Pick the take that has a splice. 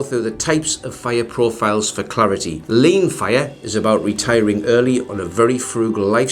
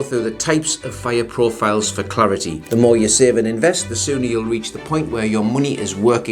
second; 1 cut; at 2.6 s

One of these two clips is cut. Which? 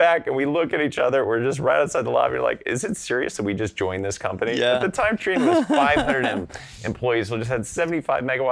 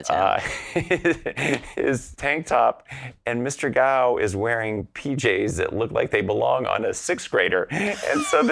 second; 1 cut; at 1.7 s

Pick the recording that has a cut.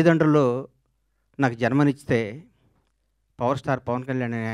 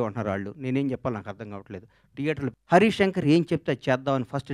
second; 1 cut; at 2.5 s

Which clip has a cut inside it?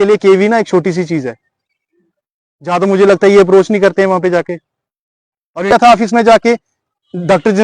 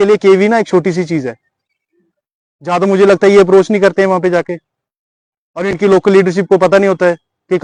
first; 1 cut; at 5.7 s

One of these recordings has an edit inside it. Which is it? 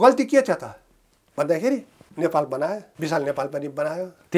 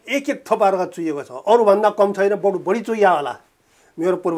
first; 2 cuts; at 2.0 s, 2.9 s

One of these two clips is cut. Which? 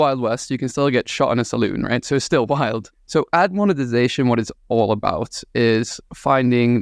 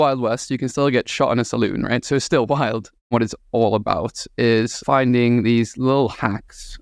second; 2 cuts; at 3.1 s, 4.8 s

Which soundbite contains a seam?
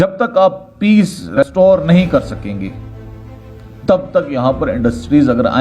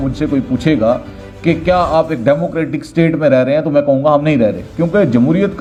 first; 1 cut; at 1.4 s

